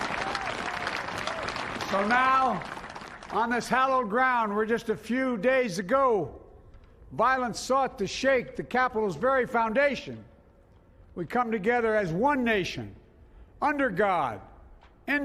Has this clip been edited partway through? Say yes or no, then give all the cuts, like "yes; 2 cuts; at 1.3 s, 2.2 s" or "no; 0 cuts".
no; 0 cuts